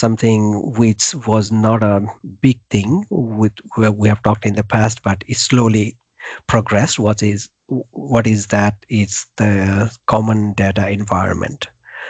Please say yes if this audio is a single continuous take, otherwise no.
yes